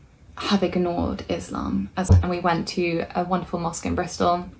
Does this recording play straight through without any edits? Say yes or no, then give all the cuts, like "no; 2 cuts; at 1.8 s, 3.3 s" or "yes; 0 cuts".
no; 1 cut; at 2.1 s